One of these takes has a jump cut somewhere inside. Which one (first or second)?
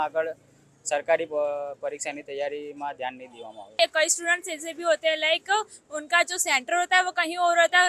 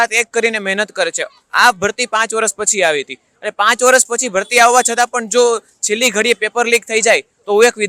first